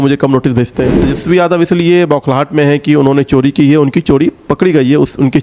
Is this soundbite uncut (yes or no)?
no